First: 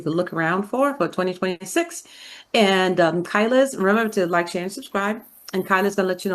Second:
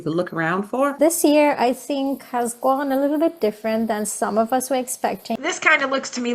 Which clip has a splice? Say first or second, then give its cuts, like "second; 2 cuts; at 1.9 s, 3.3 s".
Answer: second; 2 cuts; at 1.0 s, 5.4 s